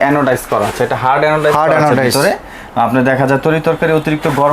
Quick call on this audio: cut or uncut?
uncut